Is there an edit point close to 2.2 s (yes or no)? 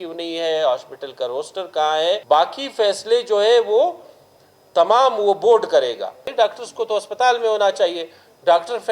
yes